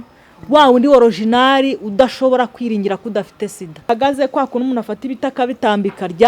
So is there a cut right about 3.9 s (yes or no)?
yes